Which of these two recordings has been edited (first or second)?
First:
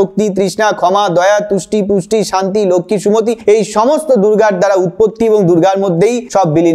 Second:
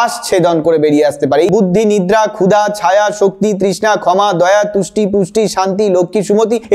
second